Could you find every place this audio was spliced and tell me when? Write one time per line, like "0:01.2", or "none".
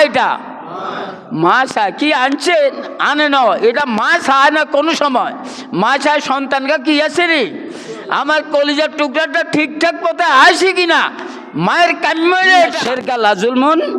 0:12.8